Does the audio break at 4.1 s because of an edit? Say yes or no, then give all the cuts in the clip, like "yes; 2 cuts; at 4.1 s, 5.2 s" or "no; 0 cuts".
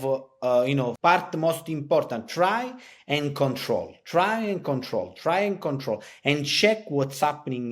no; 1 cut; at 0.9 s